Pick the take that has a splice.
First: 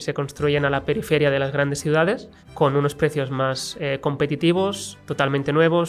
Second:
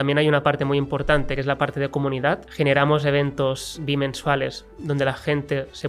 second; 3 cuts; at 1.4 s, 2.5 s, 3.8 s

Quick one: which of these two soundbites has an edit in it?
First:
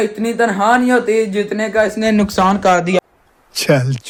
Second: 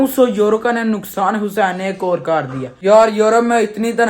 second; 1 cut; at 2.7 s

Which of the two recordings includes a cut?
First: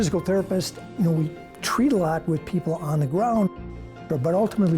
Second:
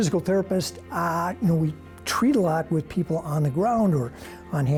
first; 2 cuts; at 0.9 s, 4.0 s

